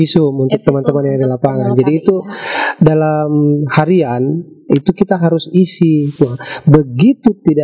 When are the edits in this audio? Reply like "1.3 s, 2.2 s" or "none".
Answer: 6.1 s